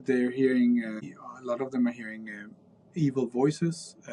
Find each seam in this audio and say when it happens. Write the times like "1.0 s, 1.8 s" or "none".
1.0 s